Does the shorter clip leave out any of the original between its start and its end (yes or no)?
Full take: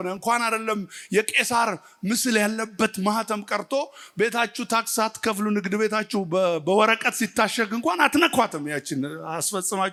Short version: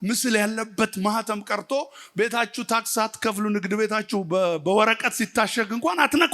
no